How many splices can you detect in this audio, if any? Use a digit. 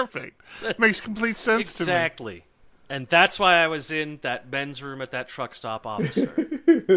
2